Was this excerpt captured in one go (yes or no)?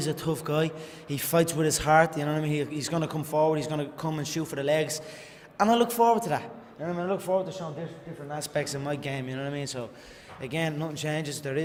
yes